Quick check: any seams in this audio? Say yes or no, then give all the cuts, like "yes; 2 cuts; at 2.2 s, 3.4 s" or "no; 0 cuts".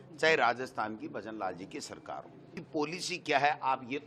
yes; 1 cut; at 2.5 s